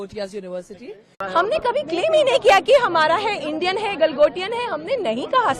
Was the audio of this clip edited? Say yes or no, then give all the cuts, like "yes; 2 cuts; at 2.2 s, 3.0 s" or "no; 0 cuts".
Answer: yes; 1 cut; at 1.1 s